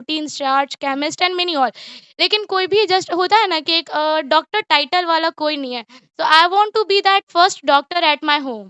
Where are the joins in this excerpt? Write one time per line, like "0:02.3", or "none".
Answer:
none